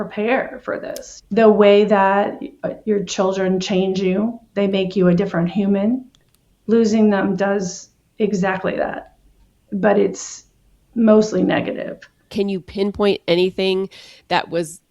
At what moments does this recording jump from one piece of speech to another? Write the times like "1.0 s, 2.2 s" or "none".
1.0 s, 12.3 s